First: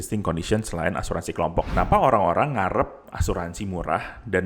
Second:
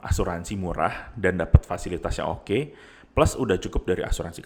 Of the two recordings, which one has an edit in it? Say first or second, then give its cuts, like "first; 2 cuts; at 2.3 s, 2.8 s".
first; 1 cut; at 1.7 s